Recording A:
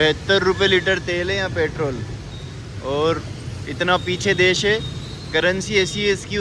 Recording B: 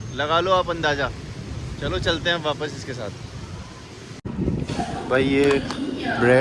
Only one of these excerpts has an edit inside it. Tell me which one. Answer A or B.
B